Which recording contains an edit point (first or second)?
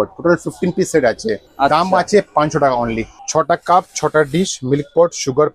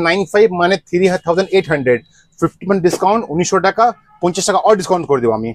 first